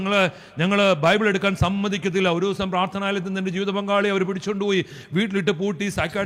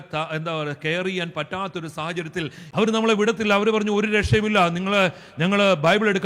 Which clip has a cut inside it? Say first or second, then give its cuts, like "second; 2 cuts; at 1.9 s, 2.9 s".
second; 1 cut; at 2.6 s